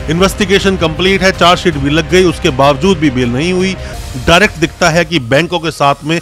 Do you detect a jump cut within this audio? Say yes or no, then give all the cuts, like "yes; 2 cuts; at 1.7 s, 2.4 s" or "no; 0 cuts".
yes; 1 cut; at 3.9 s